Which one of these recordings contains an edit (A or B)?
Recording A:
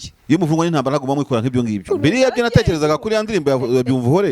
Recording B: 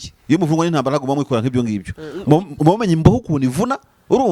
A